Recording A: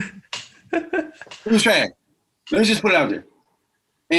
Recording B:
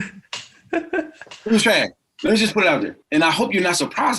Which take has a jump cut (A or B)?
B